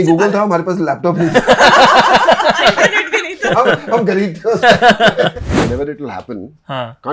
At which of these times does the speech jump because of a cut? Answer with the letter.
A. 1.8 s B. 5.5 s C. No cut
B